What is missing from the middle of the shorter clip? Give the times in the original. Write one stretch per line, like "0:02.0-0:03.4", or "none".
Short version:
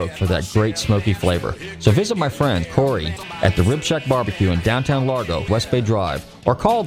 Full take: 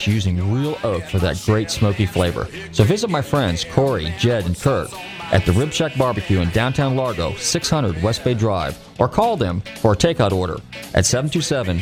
0:03.8-0:04.7
0:07.3-0:08.0